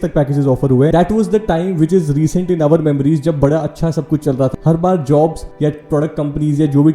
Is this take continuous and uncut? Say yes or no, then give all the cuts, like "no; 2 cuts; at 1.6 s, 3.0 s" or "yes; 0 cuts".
no; 3 cuts; at 0.9 s, 4.5 s, 5.4 s